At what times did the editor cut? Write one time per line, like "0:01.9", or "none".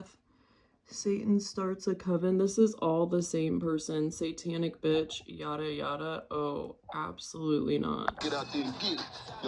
0:08.2